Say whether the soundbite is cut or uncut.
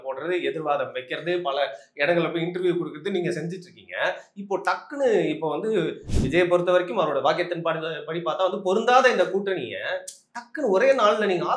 uncut